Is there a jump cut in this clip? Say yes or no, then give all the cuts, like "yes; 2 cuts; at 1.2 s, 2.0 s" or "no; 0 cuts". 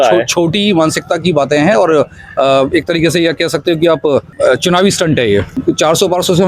yes; 2 cuts; at 4.3 s, 5.5 s